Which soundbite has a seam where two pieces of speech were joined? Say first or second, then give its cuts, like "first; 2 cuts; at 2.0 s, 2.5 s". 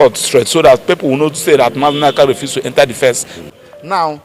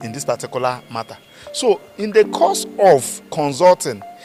first; 1 cut; at 3.3 s